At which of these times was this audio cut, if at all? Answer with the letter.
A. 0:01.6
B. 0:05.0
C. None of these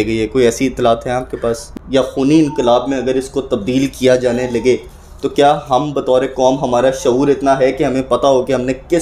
A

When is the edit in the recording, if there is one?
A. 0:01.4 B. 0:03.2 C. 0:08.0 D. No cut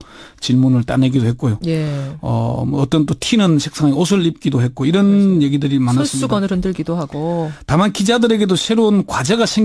D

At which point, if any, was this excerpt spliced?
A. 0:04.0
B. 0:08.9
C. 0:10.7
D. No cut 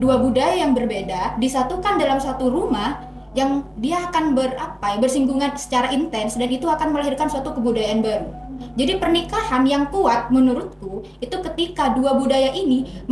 D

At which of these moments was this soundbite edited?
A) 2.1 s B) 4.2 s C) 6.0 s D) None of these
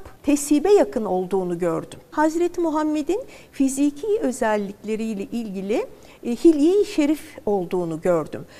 A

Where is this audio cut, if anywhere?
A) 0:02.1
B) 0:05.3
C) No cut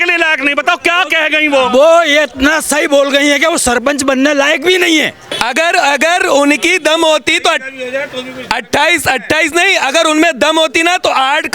B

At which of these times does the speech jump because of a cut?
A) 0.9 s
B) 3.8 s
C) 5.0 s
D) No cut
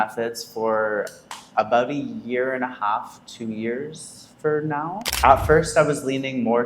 C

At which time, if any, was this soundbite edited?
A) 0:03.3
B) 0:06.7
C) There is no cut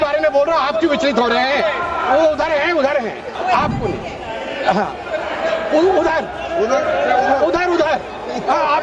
A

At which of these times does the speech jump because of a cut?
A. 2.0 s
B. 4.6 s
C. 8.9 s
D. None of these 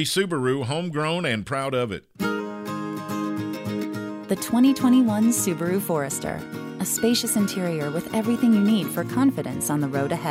A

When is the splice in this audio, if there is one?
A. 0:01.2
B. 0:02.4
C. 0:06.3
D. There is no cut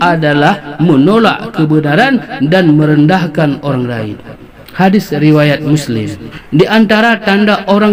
C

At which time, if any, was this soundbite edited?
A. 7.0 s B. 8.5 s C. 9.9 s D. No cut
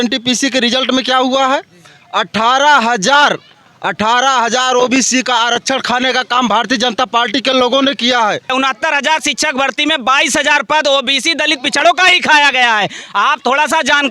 B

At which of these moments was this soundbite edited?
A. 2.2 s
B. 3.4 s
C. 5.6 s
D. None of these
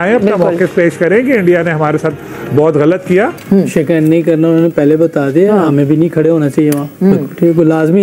B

